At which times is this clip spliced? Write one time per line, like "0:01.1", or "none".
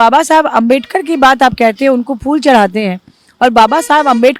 none